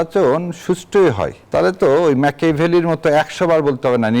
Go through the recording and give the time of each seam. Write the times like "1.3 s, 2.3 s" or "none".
1.3 s